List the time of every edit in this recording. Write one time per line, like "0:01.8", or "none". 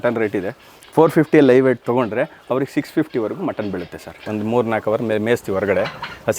0:04.2